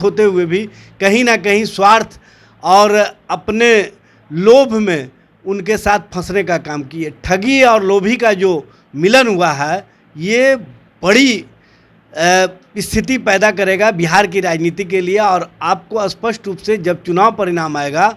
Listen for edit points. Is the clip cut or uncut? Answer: uncut